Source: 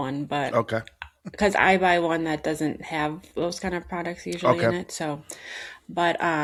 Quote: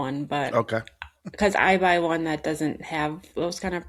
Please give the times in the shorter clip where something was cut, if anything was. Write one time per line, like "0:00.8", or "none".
none